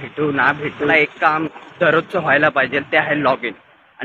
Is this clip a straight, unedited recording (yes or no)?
no